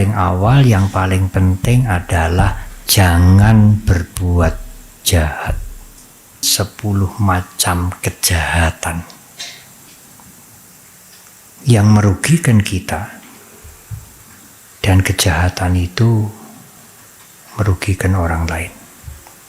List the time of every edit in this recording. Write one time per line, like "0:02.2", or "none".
0:06.5